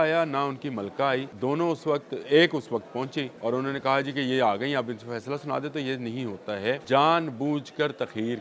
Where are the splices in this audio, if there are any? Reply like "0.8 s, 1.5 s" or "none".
1.3 s, 3.3 s, 6.8 s